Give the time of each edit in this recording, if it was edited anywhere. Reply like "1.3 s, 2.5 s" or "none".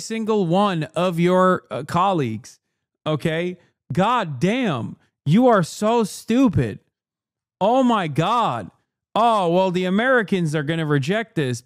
none